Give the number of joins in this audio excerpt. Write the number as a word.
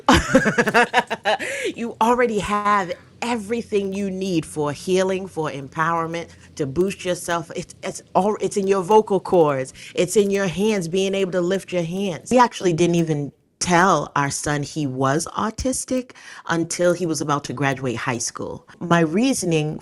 two